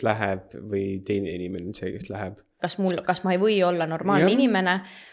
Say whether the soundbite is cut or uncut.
cut